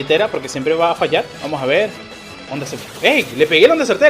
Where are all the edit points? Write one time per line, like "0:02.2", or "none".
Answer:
0:01.4